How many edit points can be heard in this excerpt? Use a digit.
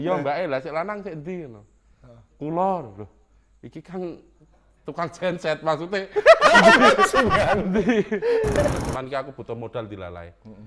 1